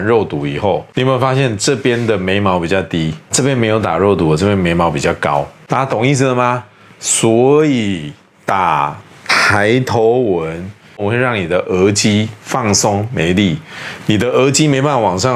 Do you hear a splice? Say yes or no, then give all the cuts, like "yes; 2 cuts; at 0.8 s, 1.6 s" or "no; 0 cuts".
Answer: no; 0 cuts